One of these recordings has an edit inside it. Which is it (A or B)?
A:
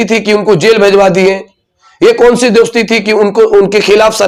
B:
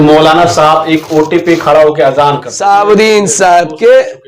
B